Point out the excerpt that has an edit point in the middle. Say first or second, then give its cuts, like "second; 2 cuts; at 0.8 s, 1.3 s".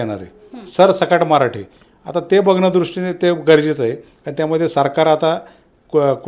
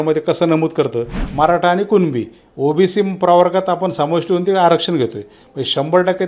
second; 1 cut; at 1.2 s